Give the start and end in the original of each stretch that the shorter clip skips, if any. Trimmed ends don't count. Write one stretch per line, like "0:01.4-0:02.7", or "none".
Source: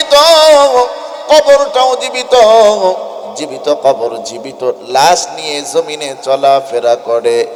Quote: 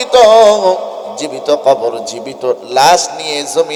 none